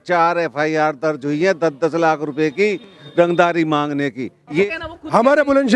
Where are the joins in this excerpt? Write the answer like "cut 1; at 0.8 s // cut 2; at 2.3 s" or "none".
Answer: cut 1; at 4.6 s